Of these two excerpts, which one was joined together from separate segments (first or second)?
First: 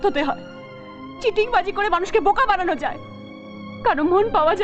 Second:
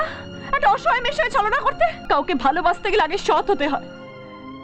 second